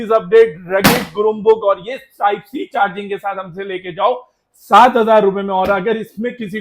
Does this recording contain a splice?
no; 0 cuts

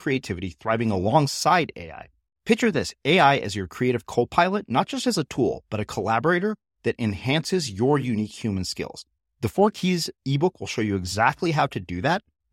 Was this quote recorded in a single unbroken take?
yes; 0 cuts

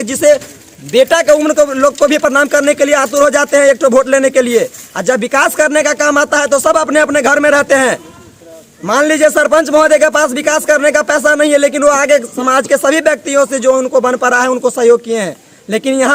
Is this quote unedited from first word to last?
yes; 0 cuts

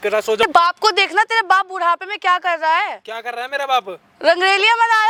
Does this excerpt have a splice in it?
no; 0 cuts

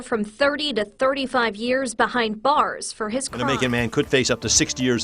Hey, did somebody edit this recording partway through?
yes; 1 cut; at 3.3 s

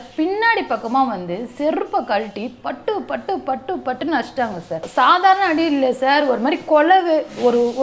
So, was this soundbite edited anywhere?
yes; 1 cut; at 4.8 s

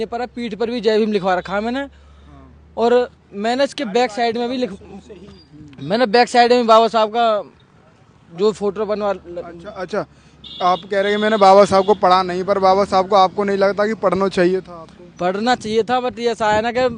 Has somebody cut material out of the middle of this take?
no; 0 cuts

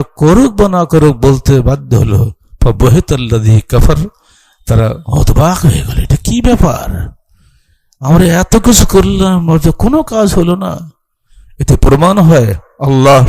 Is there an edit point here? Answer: no; 0 cuts

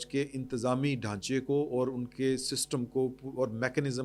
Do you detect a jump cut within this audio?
no; 0 cuts

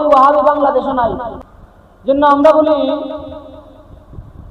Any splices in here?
yes; 1 cut; at 1.3 s

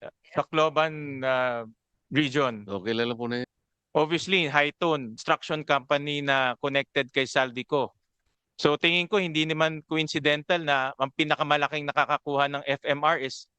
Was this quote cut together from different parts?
yes; 2 cuts; at 3.5 s, 5.2 s

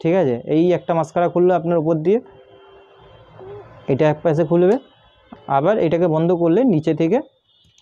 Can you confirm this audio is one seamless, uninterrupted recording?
yes; 0 cuts

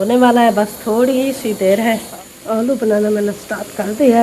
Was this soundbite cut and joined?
yes; 1 cut; at 2.1 s

